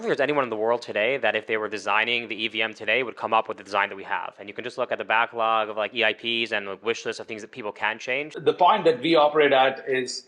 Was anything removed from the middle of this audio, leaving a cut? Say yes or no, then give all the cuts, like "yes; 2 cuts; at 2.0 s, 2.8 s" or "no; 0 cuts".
yes; 1 cut; at 8.3 s